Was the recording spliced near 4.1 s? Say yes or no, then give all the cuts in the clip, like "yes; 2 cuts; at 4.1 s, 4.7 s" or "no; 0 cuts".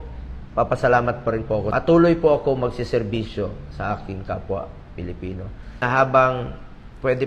no; 2 cuts; at 1.7 s, 5.8 s